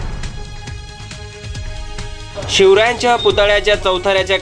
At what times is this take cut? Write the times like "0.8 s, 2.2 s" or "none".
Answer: 1.0 s